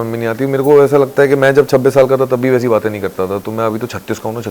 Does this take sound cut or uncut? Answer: uncut